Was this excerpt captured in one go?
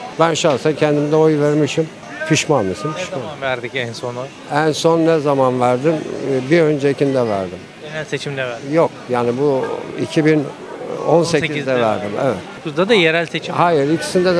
yes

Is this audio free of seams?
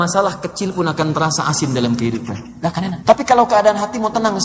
no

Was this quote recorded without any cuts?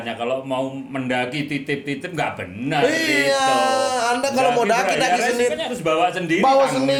yes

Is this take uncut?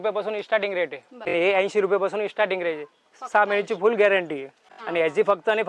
no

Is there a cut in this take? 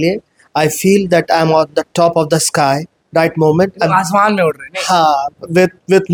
no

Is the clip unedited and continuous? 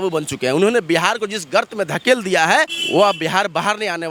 yes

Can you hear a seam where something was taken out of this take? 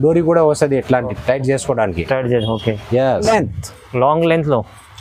yes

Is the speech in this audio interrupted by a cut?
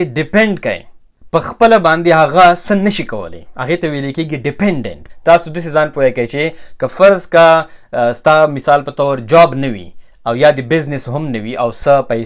yes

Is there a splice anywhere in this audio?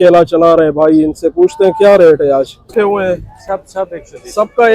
yes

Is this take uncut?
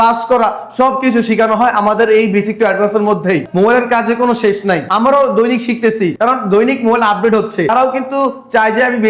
yes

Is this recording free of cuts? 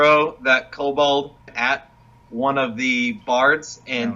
no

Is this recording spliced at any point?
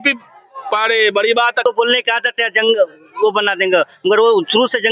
yes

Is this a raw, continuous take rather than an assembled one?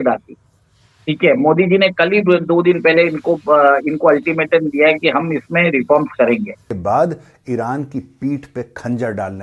no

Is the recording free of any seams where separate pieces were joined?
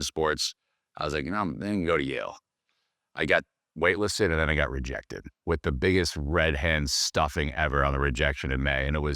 no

